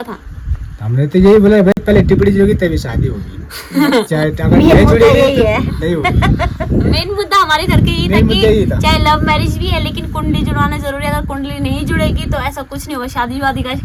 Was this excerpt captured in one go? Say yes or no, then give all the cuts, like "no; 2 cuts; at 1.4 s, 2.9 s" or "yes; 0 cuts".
yes; 0 cuts